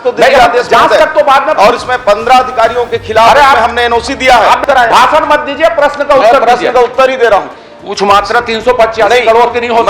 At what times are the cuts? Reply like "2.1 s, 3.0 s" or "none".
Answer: 4.6 s, 7.6 s